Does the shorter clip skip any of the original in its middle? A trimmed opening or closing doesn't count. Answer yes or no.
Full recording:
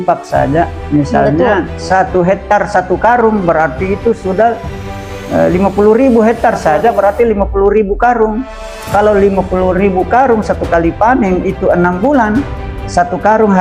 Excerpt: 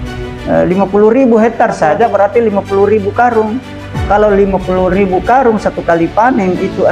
no